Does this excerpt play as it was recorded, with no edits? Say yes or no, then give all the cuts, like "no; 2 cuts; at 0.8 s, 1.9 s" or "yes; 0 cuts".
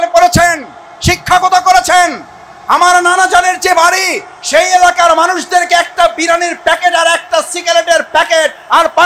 yes; 0 cuts